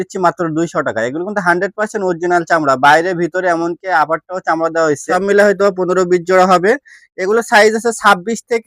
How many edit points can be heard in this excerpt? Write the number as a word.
one